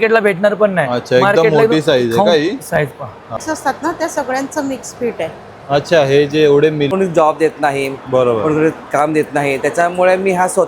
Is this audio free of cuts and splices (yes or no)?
no